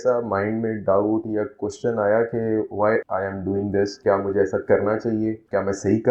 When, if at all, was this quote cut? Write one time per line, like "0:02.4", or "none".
none

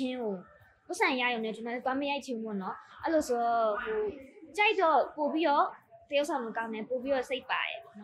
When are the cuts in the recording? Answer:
none

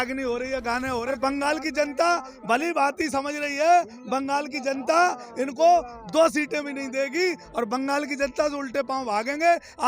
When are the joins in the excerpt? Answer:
0:01.2

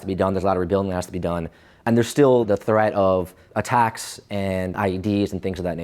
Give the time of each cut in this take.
0:01.8
0:02.5
0:03.4
0:04.7

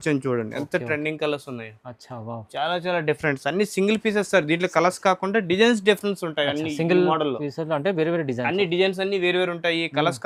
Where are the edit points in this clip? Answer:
none

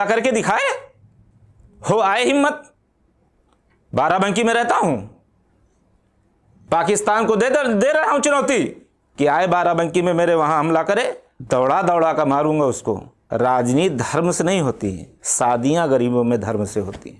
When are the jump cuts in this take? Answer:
0:11.3
0:13.1

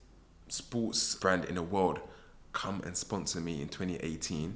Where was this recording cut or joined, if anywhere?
0:01.1

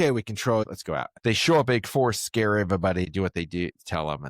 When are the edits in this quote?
0:01.1
0:03.1

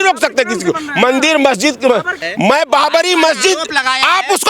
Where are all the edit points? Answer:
0:02.2

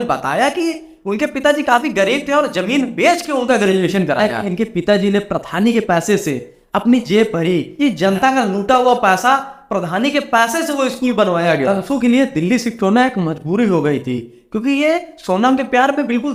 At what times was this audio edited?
0:04.4
0:07.7
0:11.7

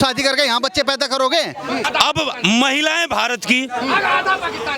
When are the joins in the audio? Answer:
0:01.9

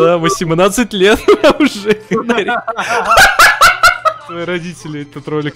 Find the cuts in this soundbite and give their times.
0:04.3

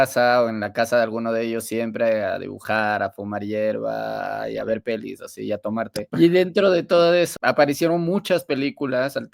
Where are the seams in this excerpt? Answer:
0:06.1
0:07.3

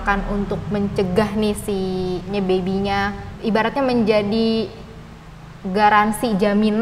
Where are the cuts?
0:02.3
0:03.3

